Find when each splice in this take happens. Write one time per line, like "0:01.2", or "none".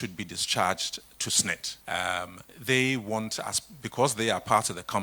0:01.7
0:02.5